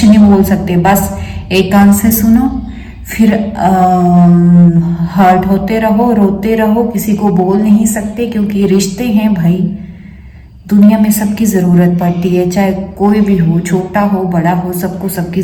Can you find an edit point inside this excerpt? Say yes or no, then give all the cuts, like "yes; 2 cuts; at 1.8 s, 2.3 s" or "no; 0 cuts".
no; 0 cuts